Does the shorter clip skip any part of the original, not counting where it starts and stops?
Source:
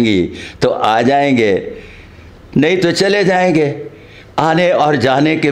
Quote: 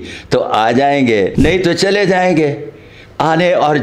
yes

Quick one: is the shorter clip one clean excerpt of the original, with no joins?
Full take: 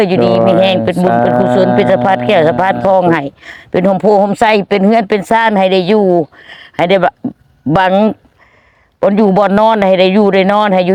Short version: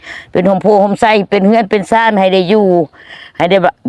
yes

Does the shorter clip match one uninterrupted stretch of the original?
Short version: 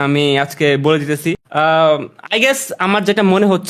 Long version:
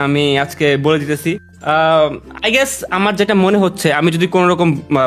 no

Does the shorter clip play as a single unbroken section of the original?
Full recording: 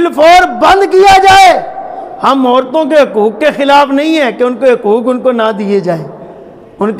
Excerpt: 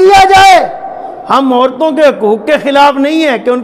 yes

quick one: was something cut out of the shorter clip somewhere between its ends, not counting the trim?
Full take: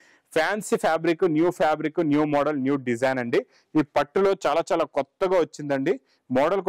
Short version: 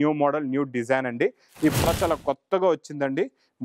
yes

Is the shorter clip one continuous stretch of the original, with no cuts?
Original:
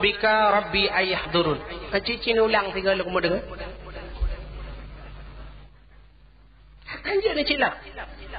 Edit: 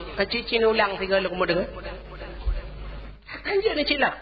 no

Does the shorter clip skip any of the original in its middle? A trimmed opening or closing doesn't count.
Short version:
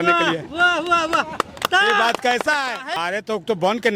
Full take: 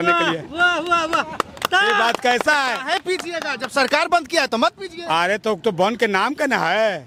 yes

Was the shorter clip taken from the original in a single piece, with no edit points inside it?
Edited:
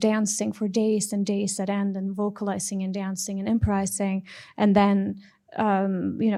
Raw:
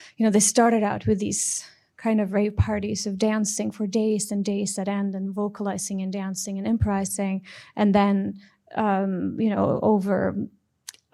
yes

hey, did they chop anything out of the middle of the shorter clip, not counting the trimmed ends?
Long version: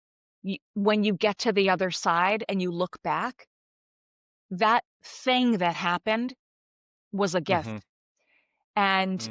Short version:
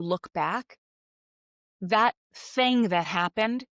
no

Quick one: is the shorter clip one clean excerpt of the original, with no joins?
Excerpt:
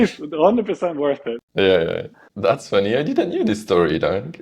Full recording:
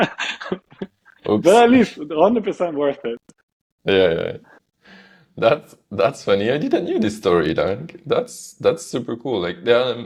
no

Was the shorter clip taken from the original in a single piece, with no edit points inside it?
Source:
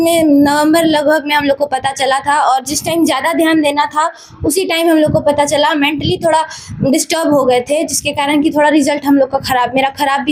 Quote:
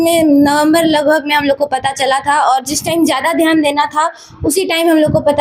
yes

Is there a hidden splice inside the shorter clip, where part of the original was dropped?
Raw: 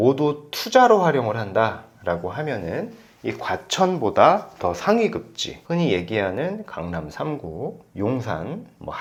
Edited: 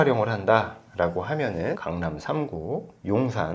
yes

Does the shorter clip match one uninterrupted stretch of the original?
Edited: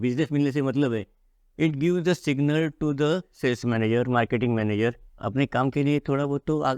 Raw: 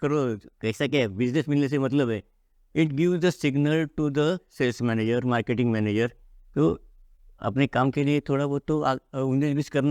no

